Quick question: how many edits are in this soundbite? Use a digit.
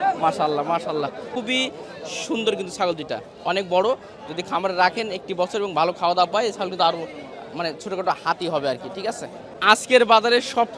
2